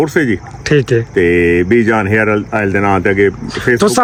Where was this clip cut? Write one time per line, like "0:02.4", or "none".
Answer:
none